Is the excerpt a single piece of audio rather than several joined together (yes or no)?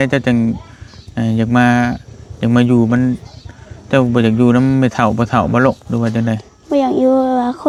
yes